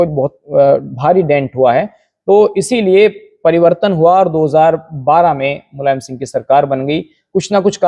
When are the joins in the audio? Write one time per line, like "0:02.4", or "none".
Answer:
none